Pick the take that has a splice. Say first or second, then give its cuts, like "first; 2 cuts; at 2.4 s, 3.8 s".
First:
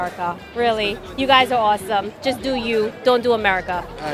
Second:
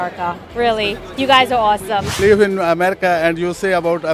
second; 1 cut; at 2.1 s